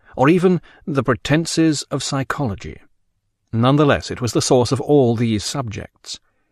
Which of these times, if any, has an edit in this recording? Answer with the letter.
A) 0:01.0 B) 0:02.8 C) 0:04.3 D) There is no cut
A